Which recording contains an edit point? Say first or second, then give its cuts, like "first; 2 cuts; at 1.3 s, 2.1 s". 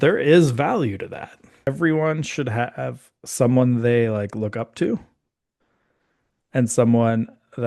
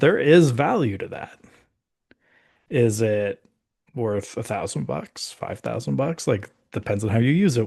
first; 1 cut; at 1.7 s